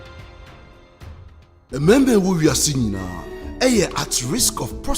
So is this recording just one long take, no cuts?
no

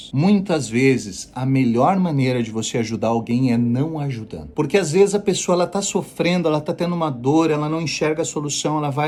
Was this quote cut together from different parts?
no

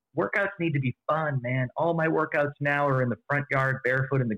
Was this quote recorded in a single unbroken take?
yes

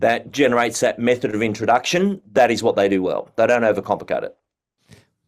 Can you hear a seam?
no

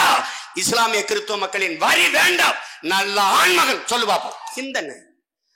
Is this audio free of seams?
no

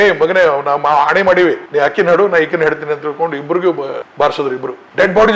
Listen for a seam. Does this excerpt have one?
yes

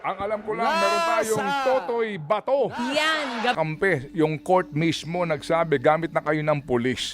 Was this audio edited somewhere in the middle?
yes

